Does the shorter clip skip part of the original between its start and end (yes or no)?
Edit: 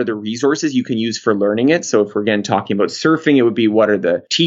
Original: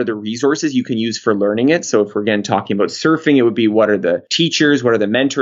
no